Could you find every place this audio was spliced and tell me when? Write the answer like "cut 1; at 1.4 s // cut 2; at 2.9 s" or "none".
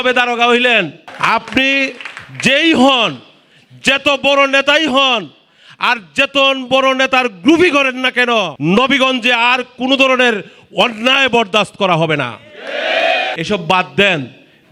cut 1; at 1.1 s // cut 2; at 8.5 s // cut 3; at 13.3 s